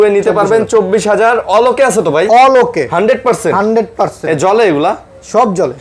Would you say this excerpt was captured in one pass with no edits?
yes; 0 cuts

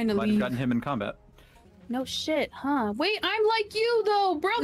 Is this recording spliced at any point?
no; 0 cuts

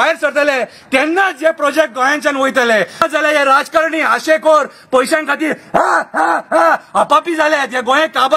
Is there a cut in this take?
no; 0 cuts

